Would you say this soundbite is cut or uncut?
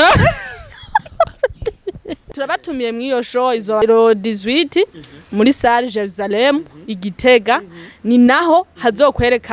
cut